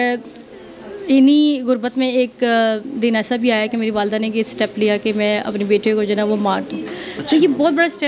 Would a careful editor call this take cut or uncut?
uncut